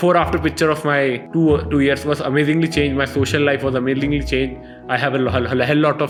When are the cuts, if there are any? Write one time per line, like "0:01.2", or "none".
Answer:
none